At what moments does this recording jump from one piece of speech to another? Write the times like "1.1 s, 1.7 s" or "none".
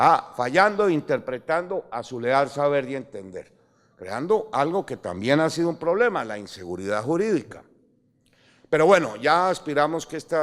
7.0 s